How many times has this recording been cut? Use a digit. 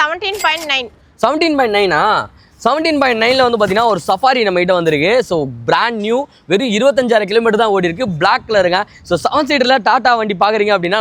0